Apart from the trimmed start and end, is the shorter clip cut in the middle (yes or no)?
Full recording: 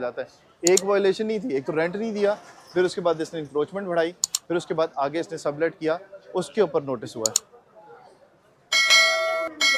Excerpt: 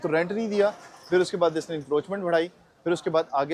no